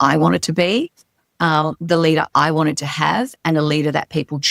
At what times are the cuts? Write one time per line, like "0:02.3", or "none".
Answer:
none